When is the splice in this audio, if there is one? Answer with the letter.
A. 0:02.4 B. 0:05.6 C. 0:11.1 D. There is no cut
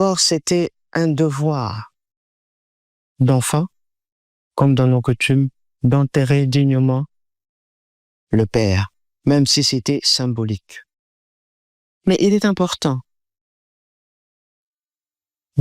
D